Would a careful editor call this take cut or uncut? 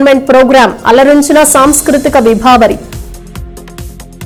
uncut